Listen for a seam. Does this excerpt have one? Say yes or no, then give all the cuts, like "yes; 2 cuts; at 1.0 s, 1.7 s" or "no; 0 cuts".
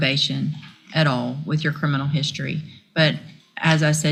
no; 0 cuts